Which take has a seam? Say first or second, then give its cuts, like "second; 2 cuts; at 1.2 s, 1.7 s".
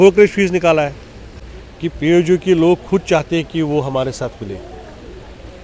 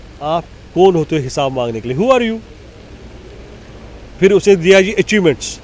first; 1 cut; at 1.3 s